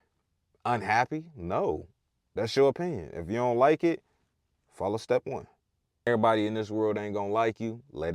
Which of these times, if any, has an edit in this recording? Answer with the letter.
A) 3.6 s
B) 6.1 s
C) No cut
B